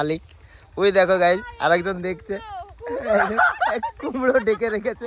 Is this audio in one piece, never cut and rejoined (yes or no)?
yes